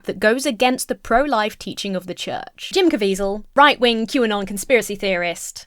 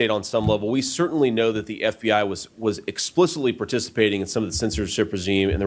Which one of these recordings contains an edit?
first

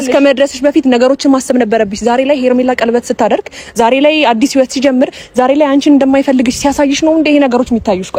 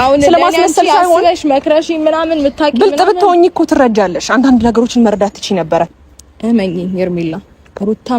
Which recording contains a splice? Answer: second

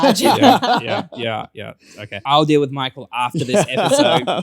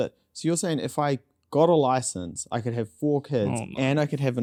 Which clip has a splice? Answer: first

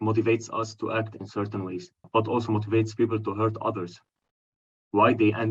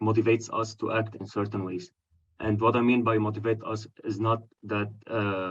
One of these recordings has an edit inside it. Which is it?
first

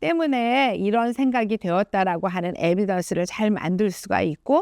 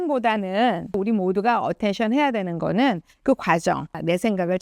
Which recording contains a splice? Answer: second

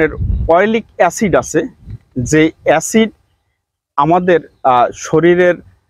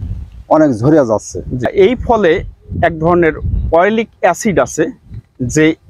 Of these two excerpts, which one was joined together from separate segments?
second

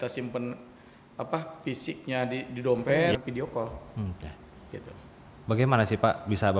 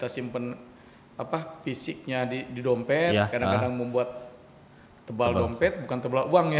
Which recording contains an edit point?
first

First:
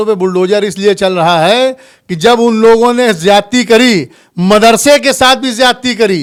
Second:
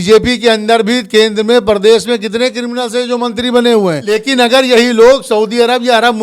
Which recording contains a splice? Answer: second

